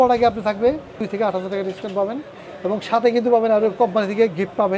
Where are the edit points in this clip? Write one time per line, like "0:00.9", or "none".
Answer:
0:01.0